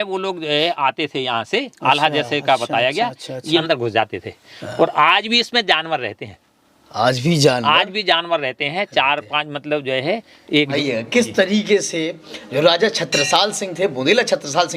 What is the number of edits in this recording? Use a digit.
2